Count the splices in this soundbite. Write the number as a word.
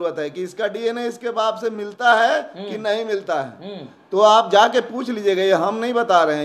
zero